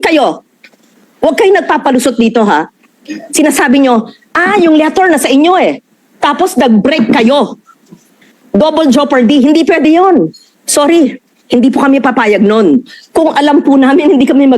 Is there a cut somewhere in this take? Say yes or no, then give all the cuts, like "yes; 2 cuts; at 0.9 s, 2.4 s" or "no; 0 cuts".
no; 0 cuts